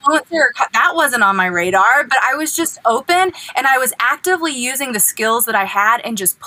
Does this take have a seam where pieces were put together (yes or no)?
no